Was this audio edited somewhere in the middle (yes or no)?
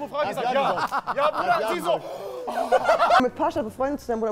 yes